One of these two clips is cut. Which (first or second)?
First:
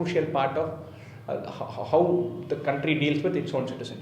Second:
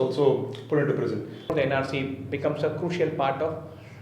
second